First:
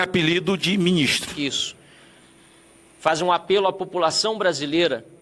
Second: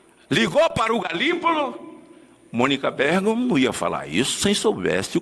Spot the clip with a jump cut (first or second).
first